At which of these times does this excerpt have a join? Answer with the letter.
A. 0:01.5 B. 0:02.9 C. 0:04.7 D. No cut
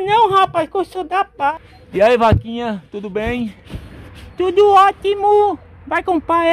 A